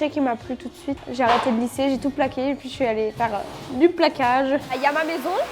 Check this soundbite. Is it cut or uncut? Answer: cut